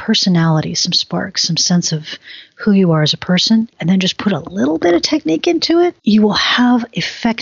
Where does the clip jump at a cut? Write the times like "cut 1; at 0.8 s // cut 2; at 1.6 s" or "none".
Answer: cut 1; at 3.8 s // cut 2; at 6.0 s